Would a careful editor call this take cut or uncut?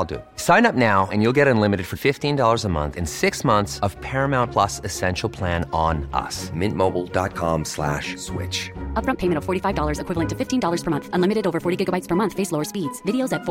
uncut